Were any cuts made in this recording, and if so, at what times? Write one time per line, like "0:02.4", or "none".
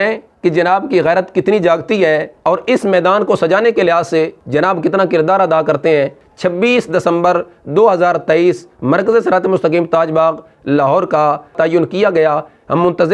0:06.2
0:11.5